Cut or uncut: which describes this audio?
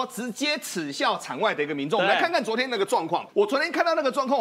cut